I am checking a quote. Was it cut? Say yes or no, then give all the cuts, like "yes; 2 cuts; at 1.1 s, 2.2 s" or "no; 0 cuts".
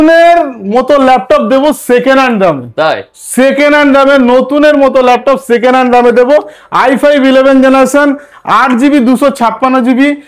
no; 0 cuts